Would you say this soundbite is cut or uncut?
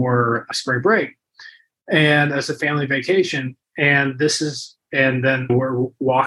uncut